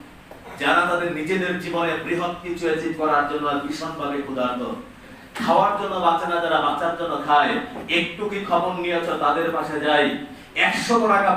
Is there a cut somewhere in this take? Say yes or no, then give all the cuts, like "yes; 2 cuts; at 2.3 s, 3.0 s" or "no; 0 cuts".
yes; 1 cut; at 5.2 s